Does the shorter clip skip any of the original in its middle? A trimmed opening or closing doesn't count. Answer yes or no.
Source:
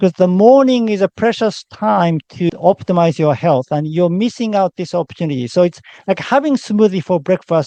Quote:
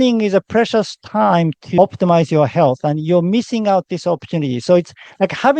yes